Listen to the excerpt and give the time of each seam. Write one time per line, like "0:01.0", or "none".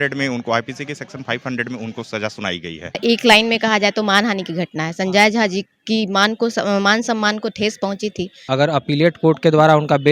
0:03.0
0:08.5